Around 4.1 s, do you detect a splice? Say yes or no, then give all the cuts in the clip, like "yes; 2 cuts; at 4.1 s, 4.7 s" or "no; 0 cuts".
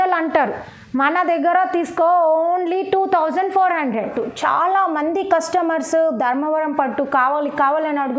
yes; 1 cut; at 4.1 s